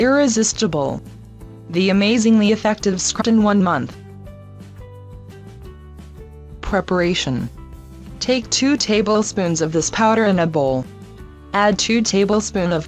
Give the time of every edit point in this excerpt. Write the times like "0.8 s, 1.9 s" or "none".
none